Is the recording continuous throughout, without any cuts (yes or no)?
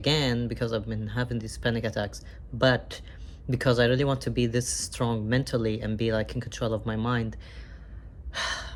yes